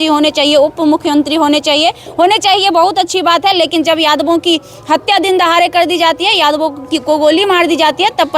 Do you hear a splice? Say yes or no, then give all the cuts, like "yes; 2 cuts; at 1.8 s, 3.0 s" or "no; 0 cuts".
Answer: no; 0 cuts